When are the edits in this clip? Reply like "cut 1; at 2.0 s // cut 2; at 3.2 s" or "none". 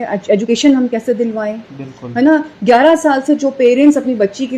none